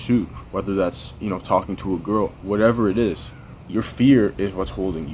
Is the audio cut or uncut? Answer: uncut